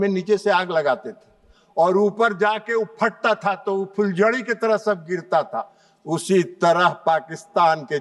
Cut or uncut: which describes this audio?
uncut